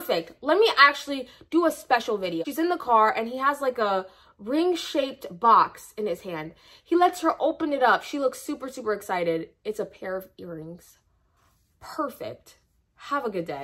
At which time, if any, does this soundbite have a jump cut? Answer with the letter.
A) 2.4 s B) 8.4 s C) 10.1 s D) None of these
A